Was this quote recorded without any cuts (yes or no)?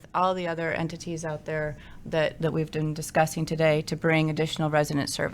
yes